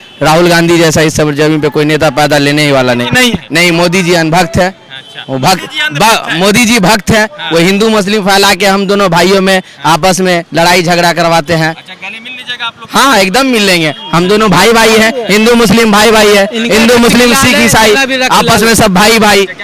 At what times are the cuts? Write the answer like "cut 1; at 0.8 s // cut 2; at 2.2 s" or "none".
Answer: none